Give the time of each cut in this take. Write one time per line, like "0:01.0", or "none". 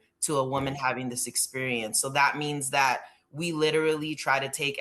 none